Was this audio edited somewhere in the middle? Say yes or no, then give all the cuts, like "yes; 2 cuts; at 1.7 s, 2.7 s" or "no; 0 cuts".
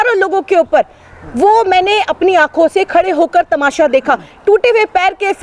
no; 0 cuts